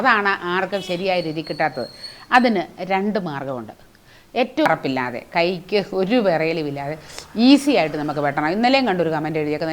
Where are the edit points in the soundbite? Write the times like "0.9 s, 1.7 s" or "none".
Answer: 4.7 s